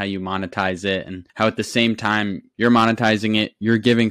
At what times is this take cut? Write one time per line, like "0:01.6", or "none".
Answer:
none